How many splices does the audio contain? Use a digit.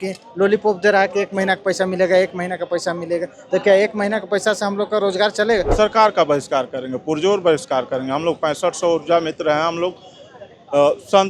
1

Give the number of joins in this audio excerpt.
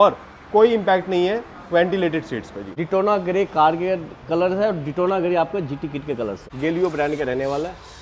2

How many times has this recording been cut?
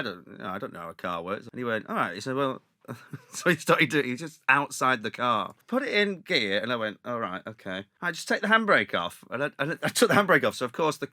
3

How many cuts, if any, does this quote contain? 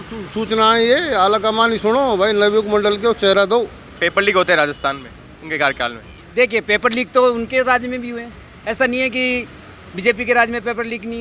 1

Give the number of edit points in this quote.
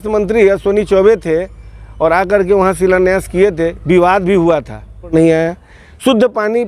1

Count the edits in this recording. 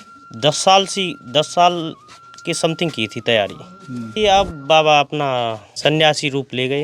2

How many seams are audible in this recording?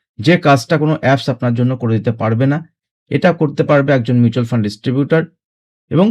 0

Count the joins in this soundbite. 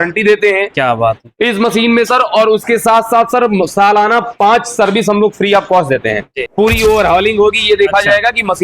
1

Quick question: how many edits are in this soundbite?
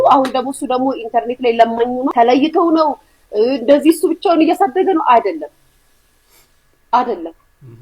1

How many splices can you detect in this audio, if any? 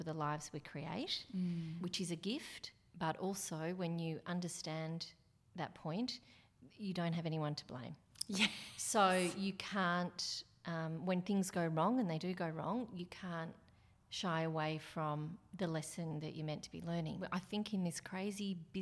1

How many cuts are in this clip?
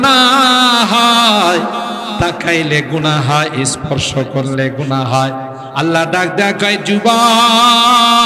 0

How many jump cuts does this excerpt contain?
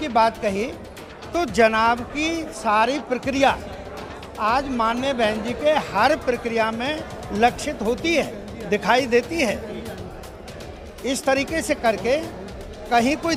0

